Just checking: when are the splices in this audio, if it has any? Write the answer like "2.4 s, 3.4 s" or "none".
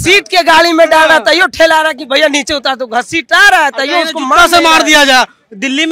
none